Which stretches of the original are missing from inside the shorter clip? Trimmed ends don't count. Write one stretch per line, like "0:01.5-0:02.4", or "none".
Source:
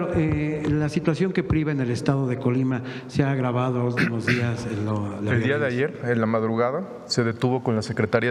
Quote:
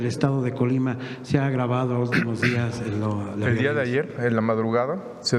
none